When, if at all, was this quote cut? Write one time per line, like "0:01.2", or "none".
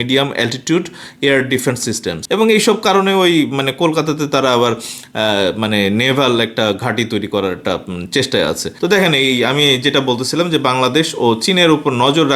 0:02.1
0:08.7